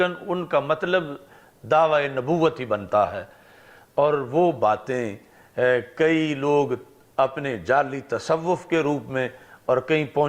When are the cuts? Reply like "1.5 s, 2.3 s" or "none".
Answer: none